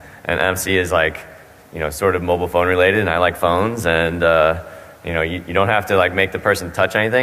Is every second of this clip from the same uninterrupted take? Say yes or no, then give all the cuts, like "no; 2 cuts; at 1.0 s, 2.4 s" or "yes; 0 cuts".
no; 1 cut; at 2.1 s